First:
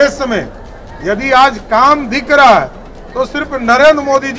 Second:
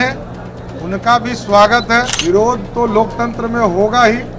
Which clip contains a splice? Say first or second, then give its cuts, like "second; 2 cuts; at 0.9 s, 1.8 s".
second; 1 cut; at 2.1 s